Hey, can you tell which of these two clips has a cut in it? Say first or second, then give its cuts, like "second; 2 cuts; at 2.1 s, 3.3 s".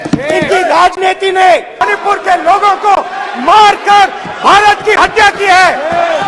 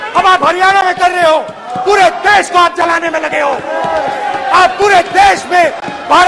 first; 1 cut; at 1.8 s